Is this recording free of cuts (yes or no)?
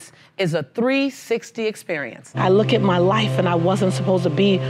no